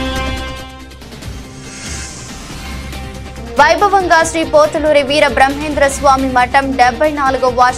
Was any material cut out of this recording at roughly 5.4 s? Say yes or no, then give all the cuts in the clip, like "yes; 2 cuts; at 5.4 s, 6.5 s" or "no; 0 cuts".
no; 1 cut; at 2.2 s